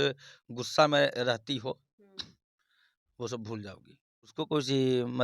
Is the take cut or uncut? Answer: cut